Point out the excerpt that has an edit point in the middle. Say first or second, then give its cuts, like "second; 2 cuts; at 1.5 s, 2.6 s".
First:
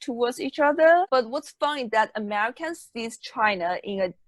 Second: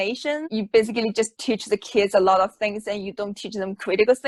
first; 1 cut; at 1.1 s